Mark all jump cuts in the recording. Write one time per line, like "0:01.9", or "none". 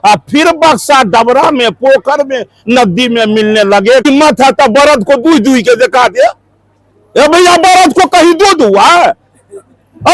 0:04.0

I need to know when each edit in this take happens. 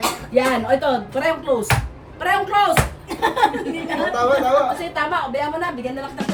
none

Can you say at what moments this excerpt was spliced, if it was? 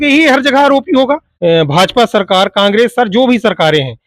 0:01.3

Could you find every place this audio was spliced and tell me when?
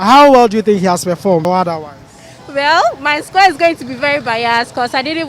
0:01.4

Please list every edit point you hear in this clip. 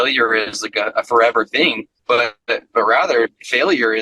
0:01.9

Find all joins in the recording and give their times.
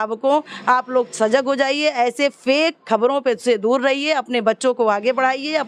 none

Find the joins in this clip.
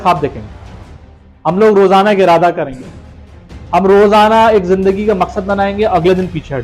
none

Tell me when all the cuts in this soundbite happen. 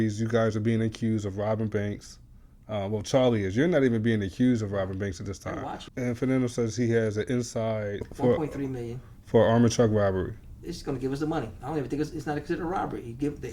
0:05.8
0:08.1

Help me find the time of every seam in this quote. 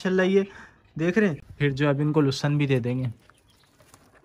0:01.5

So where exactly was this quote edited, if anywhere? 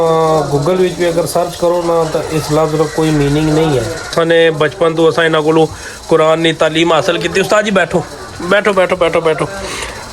0:04.1

